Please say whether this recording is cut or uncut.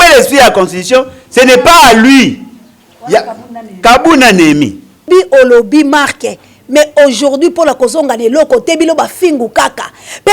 cut